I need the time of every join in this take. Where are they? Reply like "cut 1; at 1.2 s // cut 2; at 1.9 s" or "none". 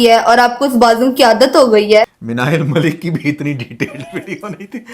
cut 1; at 2.1 s